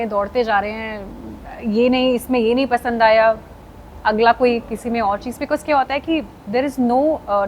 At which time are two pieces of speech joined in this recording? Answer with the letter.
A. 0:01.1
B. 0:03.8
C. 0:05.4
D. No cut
D